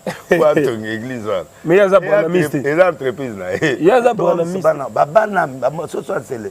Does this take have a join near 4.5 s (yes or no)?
yes